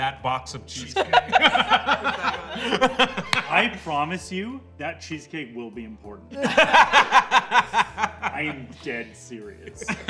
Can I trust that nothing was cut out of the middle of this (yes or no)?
yes